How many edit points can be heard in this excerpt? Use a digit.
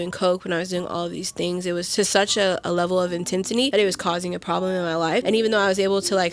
3